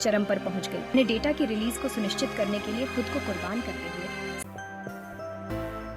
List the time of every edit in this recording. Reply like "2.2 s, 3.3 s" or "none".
0.9 s, 4.4 s